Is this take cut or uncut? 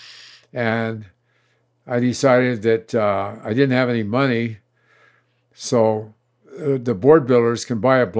uncut